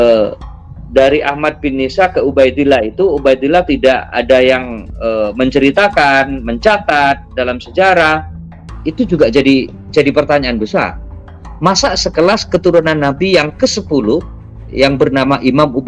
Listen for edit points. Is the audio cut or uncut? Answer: uncut